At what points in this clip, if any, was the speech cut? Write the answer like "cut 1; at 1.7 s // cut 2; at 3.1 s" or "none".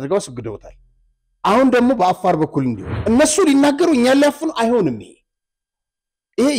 cut 1; at 2.9 s